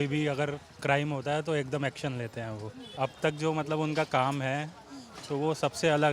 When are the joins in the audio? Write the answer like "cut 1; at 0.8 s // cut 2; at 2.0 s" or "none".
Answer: cut 1; at 2.8 s